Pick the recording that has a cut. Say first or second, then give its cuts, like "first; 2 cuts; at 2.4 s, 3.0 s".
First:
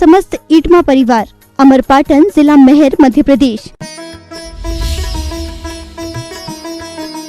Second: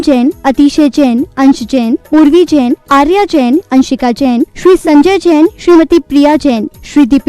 first; 1 cut; at 3.7 s